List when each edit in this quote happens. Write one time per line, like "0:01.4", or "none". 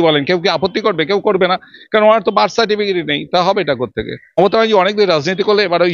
0:04.4